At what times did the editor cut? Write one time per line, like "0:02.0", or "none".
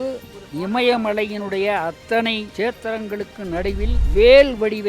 0:02.5
0:04.0